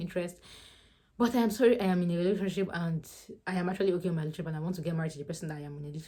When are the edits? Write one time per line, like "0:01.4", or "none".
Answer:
none